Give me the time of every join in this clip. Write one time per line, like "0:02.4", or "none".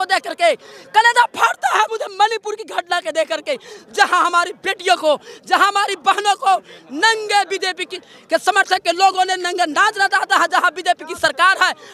none